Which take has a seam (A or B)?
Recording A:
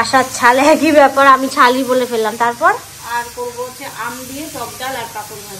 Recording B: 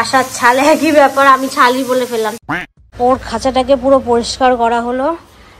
B